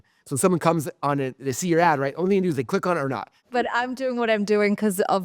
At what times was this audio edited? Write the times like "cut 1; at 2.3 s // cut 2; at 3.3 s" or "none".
cut 1; at 3.4 s